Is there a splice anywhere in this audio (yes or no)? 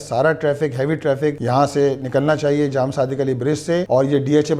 yes